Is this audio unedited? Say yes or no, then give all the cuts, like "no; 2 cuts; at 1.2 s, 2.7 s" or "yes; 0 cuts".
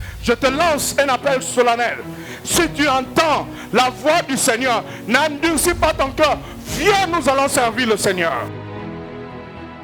yes; 0 cuts